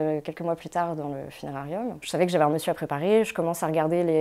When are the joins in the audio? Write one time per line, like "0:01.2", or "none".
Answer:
none

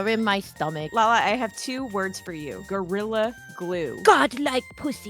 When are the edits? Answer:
0:00.9
0:02.6
0:04.0

